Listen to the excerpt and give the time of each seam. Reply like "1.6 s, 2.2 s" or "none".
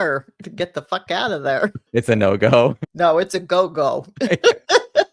1.9 s, 2.8 s